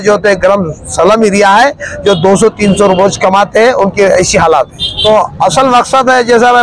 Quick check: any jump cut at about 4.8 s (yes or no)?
yes